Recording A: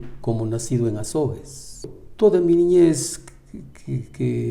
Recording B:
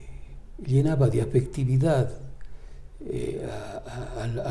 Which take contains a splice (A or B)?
A